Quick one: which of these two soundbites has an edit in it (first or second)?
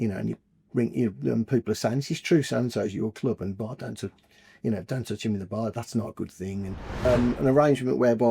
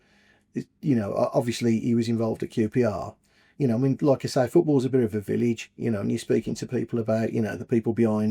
first